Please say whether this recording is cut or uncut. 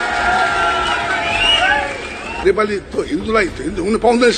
cut